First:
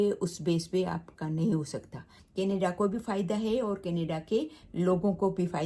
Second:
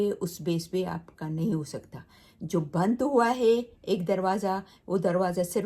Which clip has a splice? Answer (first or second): first